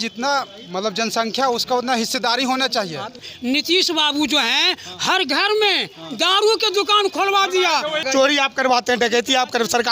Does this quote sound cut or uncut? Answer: cut